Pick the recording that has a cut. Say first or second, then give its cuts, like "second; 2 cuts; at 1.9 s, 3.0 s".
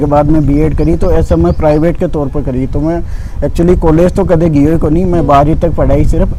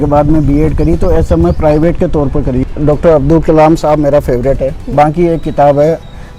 second; 1 cut; at 2.7 s